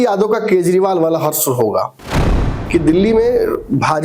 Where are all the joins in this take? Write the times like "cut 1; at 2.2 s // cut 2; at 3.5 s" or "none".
cut 1; at 2.2 s